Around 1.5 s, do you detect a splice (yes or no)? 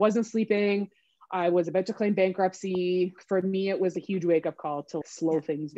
no